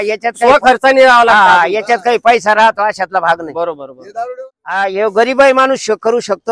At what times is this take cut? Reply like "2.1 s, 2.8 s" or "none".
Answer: 4.3 s